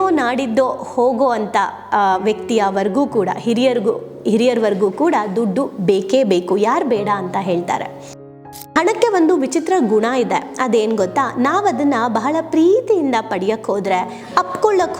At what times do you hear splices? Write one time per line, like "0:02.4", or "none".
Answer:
0:08.5